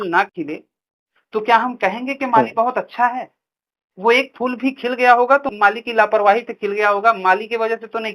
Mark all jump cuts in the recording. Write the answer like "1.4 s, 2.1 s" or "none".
5.5 s